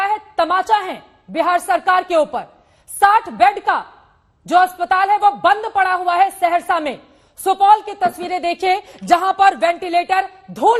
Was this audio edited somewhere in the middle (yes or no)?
no